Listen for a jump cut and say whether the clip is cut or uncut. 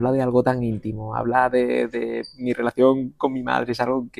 uncut